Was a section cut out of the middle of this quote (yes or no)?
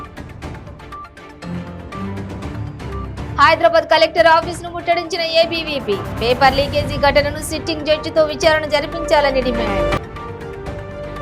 yes